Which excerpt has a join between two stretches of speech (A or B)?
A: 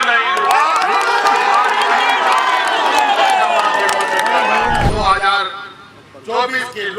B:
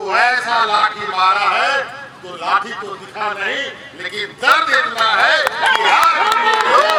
A